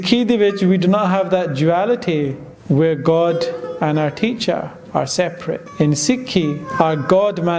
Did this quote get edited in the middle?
yes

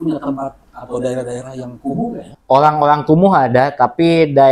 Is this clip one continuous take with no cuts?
no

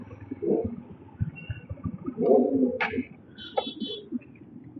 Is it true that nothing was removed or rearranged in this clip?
yes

